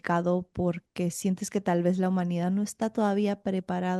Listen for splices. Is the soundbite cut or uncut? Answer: uncut